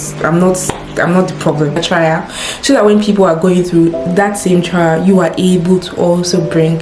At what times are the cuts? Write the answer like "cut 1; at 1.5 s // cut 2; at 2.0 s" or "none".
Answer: cut 1; at 1.8 s